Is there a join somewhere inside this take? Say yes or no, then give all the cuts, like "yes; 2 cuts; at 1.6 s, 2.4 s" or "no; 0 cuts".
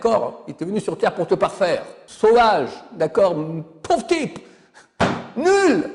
yes; 1 cut; at 2.0 s